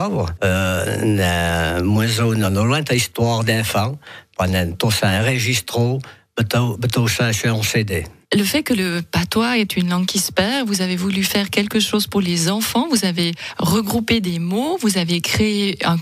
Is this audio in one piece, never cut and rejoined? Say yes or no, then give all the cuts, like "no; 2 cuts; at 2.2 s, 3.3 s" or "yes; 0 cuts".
yes; 0 cuts